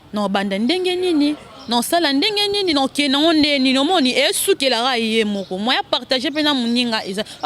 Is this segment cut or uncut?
uncut